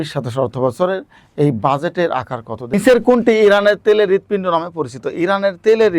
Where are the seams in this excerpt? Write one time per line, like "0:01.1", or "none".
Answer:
0:02.7